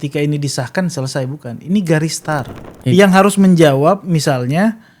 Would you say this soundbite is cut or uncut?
cut